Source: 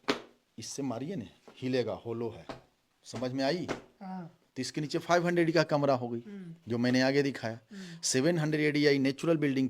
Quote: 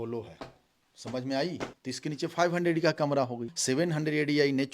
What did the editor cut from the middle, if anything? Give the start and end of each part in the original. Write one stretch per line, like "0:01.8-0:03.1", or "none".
0:03.8-0:04.5
0:06.2-0:07.9